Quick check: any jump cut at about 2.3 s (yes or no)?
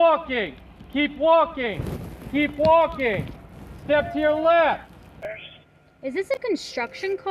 no